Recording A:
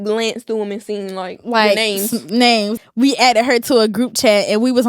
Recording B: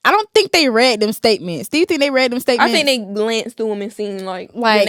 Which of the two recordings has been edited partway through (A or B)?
A